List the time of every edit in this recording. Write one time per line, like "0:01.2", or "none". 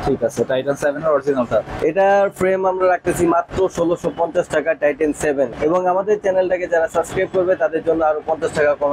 0:01.7
0:05.6